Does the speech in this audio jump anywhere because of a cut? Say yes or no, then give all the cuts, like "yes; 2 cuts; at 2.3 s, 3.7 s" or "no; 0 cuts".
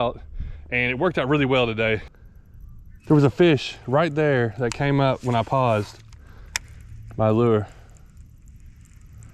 yes; 1 cut; at 2.1 s